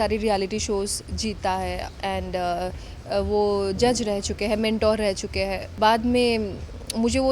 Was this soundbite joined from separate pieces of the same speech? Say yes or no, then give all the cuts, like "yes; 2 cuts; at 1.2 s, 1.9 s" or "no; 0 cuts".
yes; 1 cut; at 5.6 s